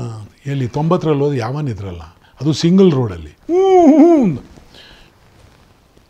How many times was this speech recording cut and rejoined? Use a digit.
0